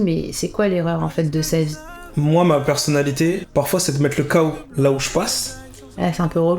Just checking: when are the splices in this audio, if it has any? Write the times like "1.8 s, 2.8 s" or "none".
1.8 s, 3.4 s, 4.6 s

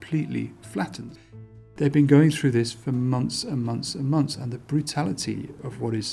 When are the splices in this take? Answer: 1.1 s

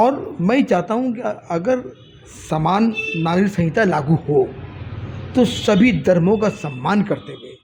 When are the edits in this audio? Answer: none

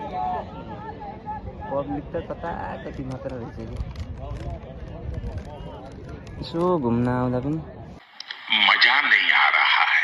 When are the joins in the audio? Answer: none

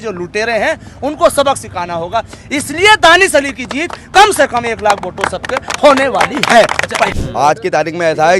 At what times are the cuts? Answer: 7.2 s

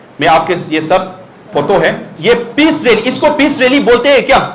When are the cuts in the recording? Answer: 2.1 s

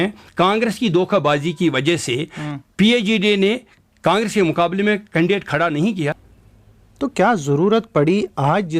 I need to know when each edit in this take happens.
6.2 s

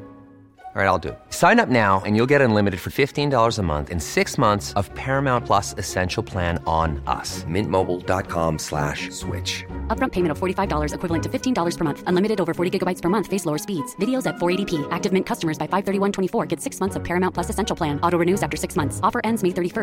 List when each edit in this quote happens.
none

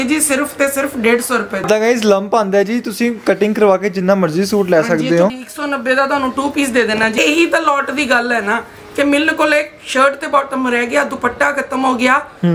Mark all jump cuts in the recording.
1.6 s, 5.3 s, 7.1 s

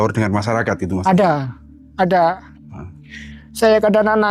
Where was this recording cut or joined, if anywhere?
none

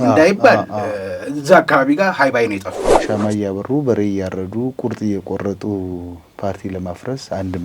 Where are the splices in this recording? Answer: 2.9 s

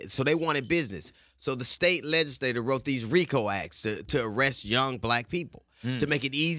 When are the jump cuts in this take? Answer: none

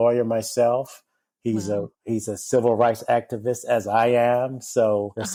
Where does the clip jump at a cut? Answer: none

